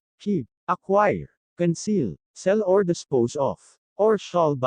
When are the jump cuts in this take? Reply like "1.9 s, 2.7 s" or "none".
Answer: 1.3 s

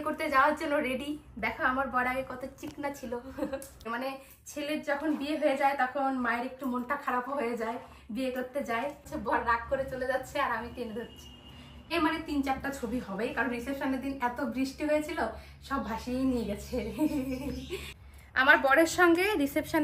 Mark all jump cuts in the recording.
3.9 s, 9.1 s, 11.9 s, 17.9 s

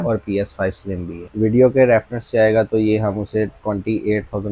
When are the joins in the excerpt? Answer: 1.1 s

